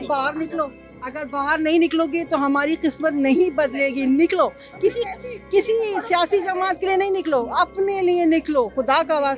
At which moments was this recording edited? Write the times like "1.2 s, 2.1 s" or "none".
none